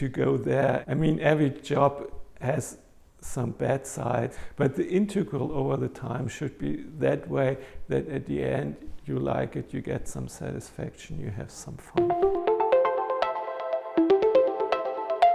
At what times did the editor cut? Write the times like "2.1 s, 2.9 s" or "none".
0.8 s, 4.4 s, 11.8 s